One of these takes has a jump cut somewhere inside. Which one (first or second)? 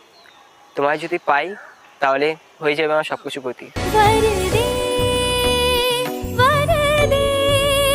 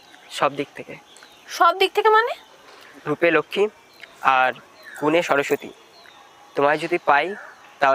second